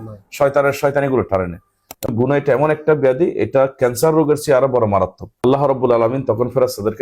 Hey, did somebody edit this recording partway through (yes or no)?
yes